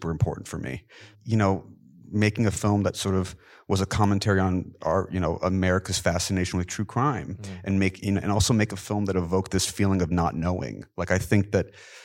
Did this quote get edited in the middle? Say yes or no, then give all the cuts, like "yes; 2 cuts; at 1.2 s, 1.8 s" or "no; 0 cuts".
yes; 1 cut; at 1.1 s